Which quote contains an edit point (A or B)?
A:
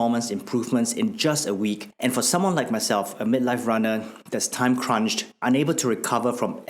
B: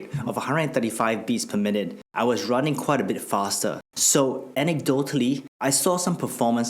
B